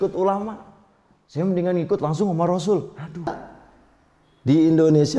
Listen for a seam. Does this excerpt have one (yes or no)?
yes